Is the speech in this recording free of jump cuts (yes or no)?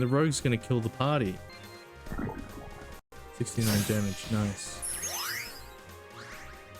no